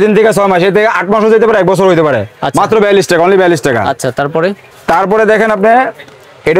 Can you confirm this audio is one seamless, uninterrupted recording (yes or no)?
yes